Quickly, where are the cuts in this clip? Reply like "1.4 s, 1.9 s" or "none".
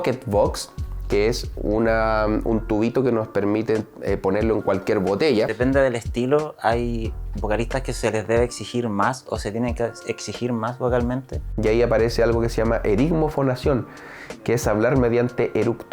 5.5 s, 11.4 s